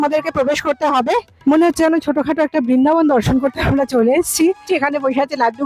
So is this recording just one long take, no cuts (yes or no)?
no